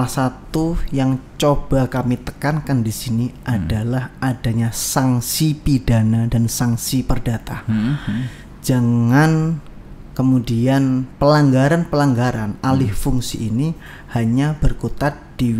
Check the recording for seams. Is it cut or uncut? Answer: uncut